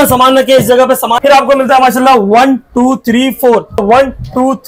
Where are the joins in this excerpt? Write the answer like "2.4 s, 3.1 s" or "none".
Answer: 1.2 s, 3.8 s